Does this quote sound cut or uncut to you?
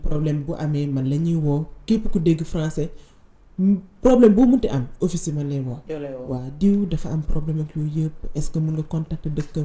uncut